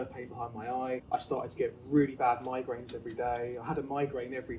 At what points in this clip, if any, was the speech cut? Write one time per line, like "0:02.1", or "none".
0:01.0